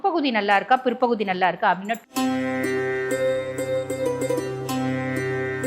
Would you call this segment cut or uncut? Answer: cut